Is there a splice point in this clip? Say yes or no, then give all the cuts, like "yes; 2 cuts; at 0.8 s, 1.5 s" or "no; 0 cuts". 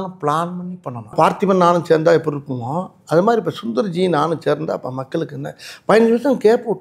yes; 1 cut; at 1.1 s